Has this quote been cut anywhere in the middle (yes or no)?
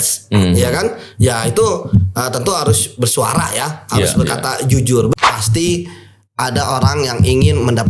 yes